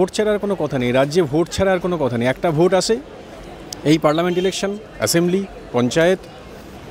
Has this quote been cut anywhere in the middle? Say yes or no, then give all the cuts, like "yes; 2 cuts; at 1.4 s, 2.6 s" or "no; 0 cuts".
no; 0 cuts